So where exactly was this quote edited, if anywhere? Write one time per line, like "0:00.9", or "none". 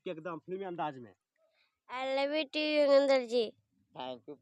none